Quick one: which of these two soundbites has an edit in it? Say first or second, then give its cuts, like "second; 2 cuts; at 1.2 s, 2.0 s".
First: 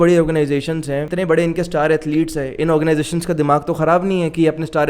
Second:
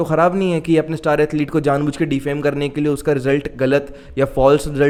first; 1 cut; at 1.1 s